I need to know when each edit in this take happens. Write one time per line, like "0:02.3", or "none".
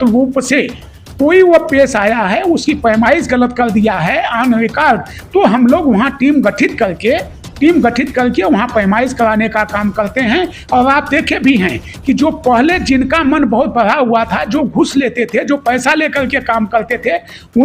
none